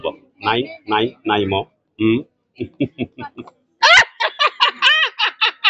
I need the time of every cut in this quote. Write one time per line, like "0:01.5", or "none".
0:03.6